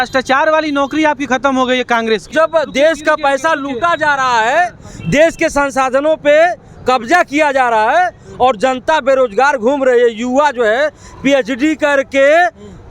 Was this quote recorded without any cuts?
no; 1 cut; at 2.3 s

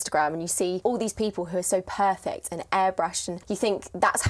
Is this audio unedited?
no; 2 cuts; at 0.8 s, 3.3 s

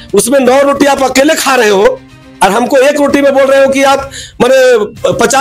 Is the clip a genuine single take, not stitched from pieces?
yes; 0 cuts

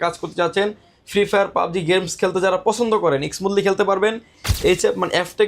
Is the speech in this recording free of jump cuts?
no; 1 cut; at 4.4 s

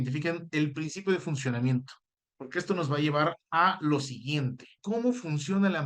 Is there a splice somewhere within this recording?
yes; 1 cut; at 4.7 s

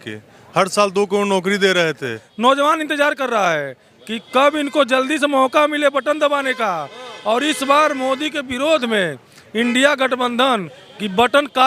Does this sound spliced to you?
yes; 1 cut; at 2.3 s

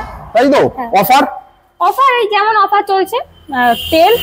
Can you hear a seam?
no; 0 cuts

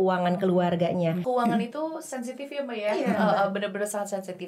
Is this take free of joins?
no; 1 cut; at 1.2 s

